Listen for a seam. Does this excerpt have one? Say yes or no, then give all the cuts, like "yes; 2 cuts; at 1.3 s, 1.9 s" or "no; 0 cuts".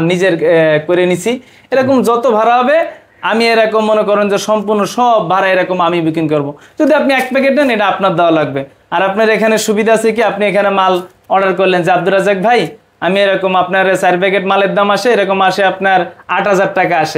no; 0 cuts